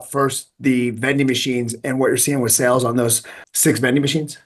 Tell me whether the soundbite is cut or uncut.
uncut